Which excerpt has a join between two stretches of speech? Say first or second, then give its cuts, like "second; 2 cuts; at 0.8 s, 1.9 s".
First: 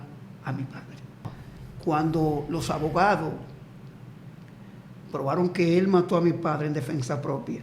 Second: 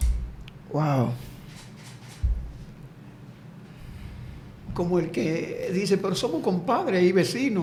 first; 1 cut; at 1.4 s